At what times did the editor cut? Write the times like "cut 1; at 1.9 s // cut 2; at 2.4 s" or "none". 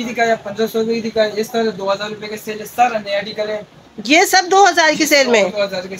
none